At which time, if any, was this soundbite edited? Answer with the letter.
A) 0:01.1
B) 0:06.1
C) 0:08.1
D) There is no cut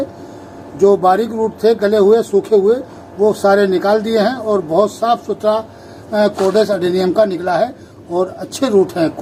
D